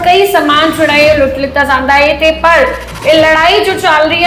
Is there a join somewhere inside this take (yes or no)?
no